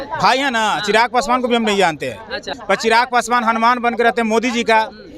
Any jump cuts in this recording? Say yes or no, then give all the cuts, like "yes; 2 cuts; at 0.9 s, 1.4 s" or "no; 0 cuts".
yes; 1 cut; at 2.5 s